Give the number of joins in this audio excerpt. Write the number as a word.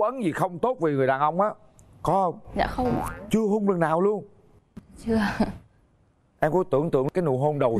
zero